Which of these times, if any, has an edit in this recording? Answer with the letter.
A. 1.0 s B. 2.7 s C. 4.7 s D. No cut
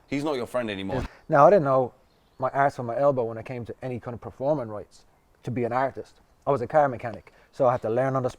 A